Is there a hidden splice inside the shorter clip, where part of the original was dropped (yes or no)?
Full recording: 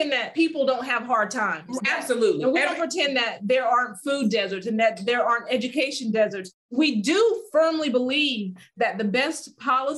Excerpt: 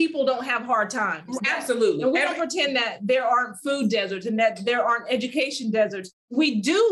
no